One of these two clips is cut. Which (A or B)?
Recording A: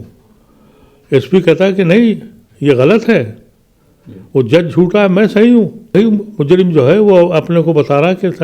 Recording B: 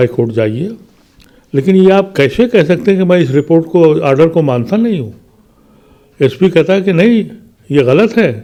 A